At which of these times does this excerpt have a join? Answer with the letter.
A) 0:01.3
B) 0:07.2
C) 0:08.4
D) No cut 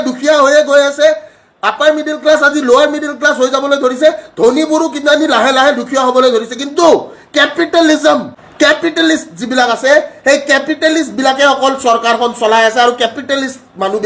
C